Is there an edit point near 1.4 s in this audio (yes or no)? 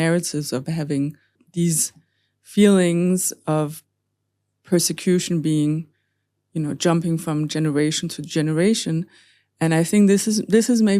yes